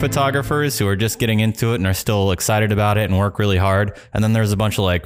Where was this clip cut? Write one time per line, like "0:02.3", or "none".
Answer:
none